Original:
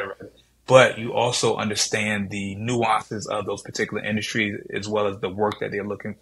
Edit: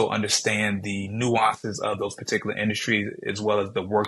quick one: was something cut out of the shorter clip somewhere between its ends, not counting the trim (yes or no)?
no